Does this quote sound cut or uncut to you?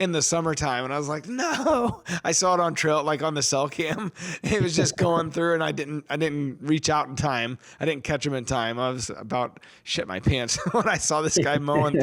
uncut